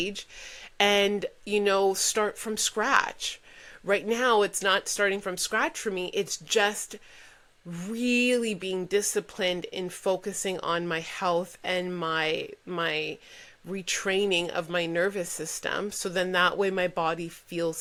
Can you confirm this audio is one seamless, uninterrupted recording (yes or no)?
yes